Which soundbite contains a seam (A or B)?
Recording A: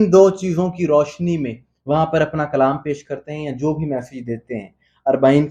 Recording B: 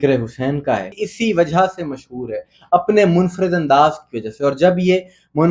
B